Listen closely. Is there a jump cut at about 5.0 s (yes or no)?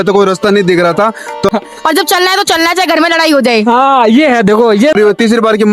yes